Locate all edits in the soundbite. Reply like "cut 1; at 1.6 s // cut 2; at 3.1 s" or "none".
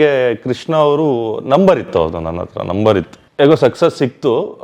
cut 1; at 3.2 s